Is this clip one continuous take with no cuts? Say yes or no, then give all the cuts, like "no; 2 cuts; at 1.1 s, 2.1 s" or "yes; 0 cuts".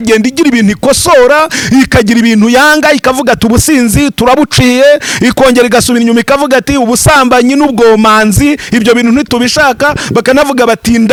yes; 0 cuts